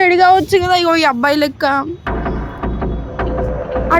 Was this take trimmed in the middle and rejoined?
yes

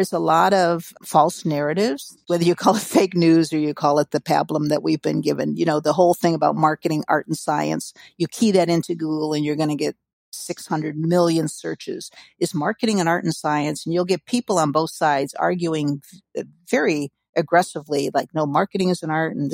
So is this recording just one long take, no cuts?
no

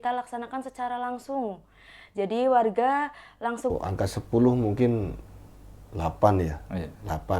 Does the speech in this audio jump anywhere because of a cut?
yes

